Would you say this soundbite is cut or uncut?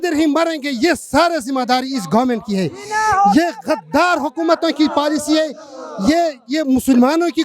uncut